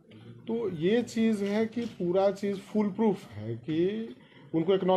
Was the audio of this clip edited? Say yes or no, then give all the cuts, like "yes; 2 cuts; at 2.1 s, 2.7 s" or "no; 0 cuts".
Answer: no; 0 cuts